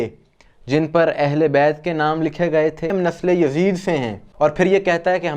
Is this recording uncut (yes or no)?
no